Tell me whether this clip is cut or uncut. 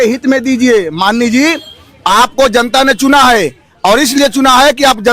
uncut